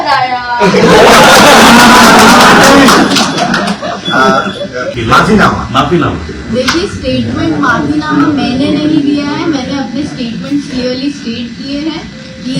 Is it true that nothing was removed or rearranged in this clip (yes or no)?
no